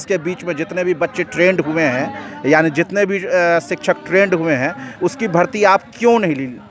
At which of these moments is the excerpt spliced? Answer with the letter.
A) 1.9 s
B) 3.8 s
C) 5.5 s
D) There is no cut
D